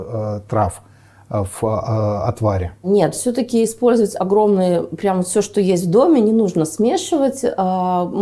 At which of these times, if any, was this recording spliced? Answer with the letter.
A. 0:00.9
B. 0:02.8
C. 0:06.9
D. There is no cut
D